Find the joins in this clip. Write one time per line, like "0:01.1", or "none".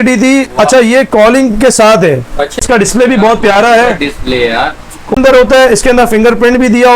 0:02.6
0:05.2